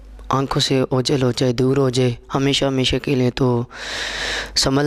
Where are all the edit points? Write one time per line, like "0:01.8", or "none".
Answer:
none